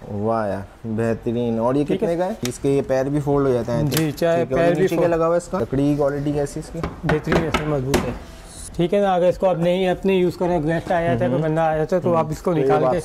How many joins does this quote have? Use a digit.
3